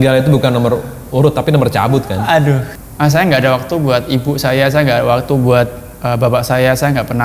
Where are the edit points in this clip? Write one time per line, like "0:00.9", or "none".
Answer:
0:02.7